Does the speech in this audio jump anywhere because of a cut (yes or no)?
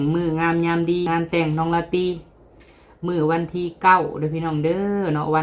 yes